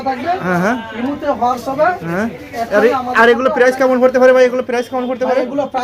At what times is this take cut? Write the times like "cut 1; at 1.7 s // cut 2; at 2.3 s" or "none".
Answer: none